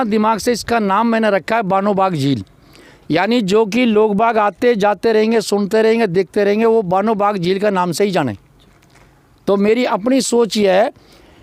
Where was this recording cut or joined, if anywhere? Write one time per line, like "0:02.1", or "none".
none